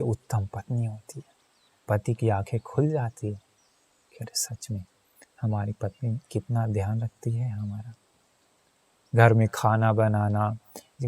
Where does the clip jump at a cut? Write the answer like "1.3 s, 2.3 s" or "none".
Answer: 1.7 s